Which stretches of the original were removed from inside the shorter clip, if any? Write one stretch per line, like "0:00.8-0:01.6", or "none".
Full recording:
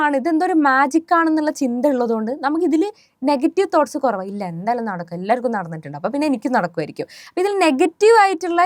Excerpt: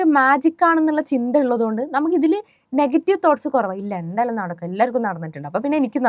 none